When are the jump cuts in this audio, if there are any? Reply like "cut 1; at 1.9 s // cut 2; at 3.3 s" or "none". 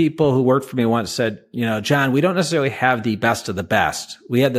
none